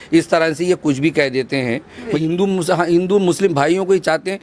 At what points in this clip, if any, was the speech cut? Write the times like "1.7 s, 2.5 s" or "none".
2.2 s